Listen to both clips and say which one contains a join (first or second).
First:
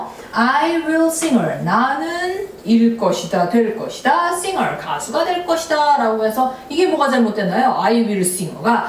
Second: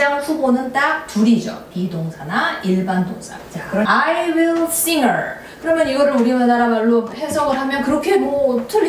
second